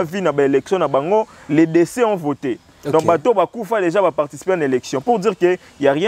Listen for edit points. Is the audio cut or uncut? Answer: uncut